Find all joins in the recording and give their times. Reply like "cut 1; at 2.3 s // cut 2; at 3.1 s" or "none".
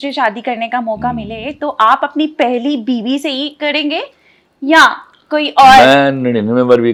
none